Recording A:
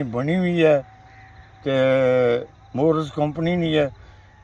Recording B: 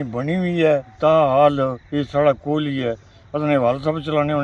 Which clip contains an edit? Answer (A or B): B